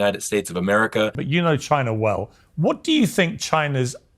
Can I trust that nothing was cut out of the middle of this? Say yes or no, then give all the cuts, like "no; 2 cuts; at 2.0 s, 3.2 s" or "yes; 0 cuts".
no; 1 cut; at 1.2 s